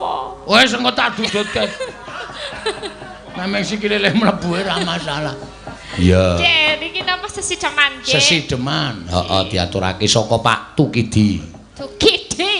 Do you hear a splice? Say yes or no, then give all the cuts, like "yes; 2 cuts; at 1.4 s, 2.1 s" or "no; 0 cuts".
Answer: no; 0 cuts